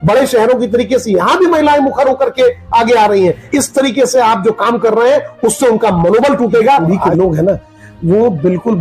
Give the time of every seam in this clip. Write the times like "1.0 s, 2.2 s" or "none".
3.5 s, 6.8 s